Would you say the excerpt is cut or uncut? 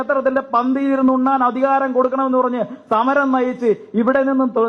uncut